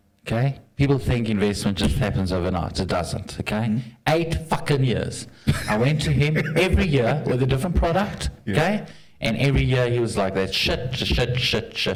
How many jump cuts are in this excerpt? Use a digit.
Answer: 0